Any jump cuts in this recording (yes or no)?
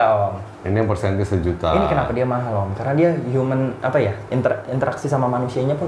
no